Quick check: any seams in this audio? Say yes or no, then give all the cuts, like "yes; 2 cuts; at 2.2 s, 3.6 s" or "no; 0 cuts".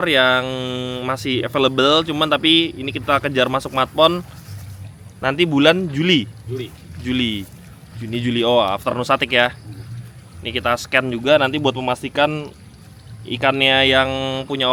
no; 0 cuts